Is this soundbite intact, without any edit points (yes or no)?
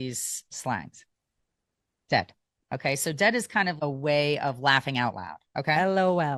no